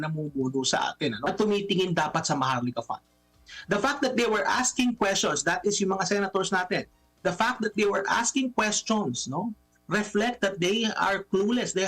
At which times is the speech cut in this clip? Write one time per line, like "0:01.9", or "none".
0:01.3